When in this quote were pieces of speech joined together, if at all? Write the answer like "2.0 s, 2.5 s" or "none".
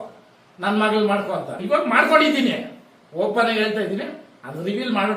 1.6 s